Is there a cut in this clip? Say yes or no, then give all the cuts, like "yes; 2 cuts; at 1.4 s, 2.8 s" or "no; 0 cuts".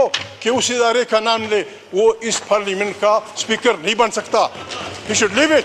no; 0 cuts